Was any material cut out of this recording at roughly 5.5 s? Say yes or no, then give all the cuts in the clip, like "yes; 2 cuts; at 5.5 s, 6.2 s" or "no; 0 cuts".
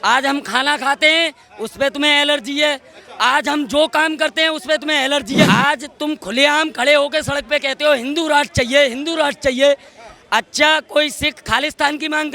yes; 1 cut; at 5.5 s